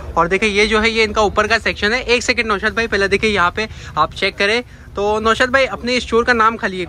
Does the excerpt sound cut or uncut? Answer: uncut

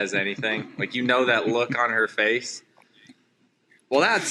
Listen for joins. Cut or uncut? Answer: uncut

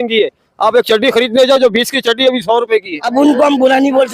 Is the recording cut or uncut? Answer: cut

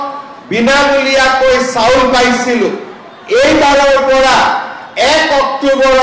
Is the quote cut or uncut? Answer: uncut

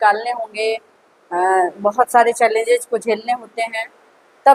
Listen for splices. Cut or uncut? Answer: uncut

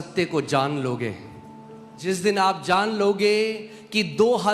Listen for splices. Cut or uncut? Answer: cut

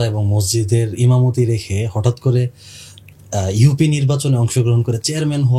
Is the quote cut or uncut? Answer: uncut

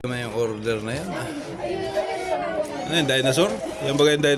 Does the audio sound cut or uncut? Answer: uncut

